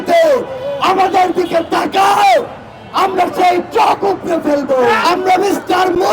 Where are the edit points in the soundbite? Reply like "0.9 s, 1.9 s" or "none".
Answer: 5.0 s